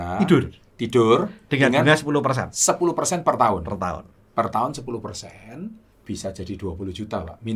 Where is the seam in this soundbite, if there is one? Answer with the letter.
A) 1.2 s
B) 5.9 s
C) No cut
B